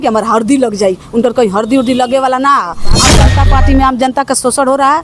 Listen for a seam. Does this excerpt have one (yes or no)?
yes